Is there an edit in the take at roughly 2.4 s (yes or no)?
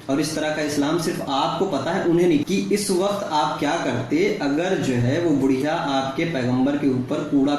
yes